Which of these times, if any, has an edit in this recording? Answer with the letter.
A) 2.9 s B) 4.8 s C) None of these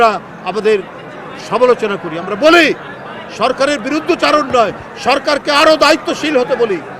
C